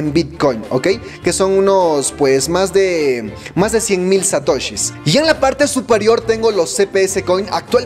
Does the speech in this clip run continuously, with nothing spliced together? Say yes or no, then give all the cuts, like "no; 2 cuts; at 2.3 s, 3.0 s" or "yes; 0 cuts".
no; 1 cut; at 4.9 s